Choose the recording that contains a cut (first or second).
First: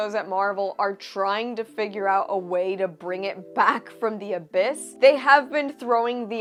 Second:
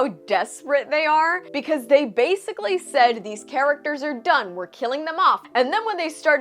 second